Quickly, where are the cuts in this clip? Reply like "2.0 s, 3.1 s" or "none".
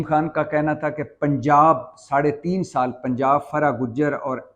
none